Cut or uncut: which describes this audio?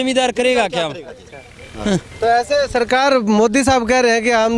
uncut